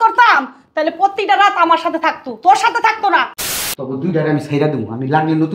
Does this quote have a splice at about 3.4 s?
yes; 1 cut; at 3.4 s

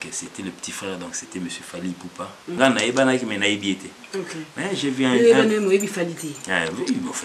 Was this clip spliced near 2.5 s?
yes; 1 cut; at 2.5 s

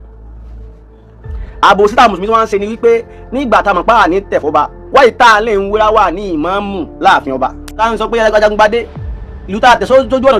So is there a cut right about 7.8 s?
yes; 1 cut; at 7.8 s

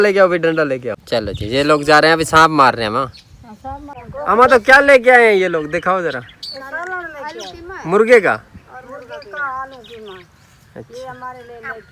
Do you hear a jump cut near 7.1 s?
no; 2 cuts; at 0.9 s, 4.0 s

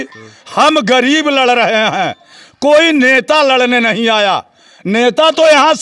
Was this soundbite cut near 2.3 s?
no; 0 cuts

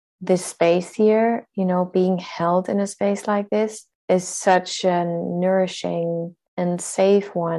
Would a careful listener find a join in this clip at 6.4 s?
yes; 2 cuts; at 3.9 s, 6.4 s

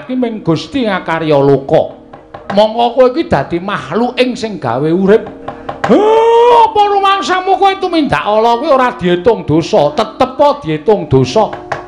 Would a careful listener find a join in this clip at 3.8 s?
yes; 1 cut; at 3.8 s

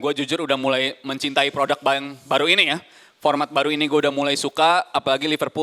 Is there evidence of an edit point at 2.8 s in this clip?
no; 0 cuts

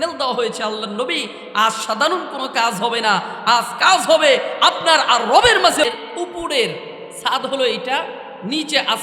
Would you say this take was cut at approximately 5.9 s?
yes; 1 cut; at 5.9 s

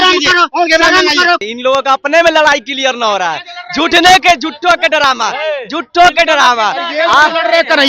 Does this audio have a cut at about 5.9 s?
no; 1 cut; at 1.4 s

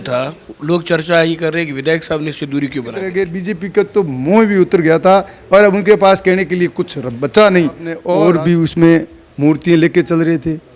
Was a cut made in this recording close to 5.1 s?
no; 2 cuts; at 3.1 s, 7.9 s

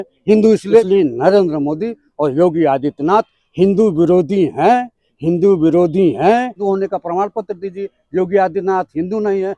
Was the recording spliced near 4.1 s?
no; 2 cuts; at 0.8 s, 6.6 s

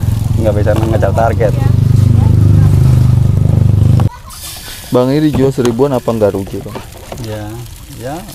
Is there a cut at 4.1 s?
yes; 1 cut; at 4.1 s

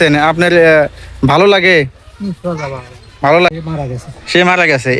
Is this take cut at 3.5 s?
yes; 1 cut; at 3.5 s

